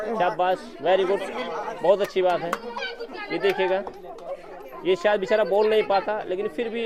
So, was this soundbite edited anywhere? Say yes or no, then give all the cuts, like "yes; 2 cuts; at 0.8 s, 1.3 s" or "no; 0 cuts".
no; 0 cuts